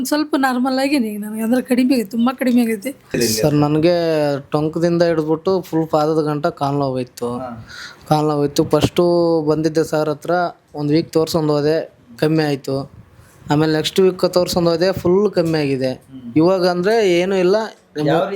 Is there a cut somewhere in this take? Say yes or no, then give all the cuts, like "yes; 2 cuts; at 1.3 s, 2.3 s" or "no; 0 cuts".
yes; 1 cut; at 3.1 s